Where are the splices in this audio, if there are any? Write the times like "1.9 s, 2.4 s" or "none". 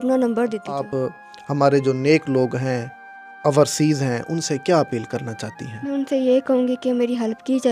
0.9 s